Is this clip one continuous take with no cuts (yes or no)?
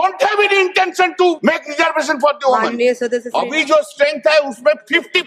no